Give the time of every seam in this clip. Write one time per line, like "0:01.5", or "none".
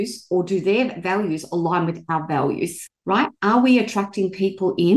0:02.9